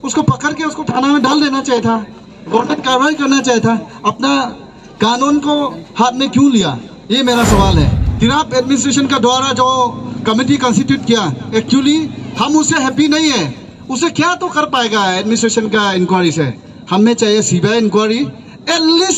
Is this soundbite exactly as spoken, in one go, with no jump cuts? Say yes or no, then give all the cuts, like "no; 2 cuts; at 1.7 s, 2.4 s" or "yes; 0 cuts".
no; 1 cut; at 8.0 s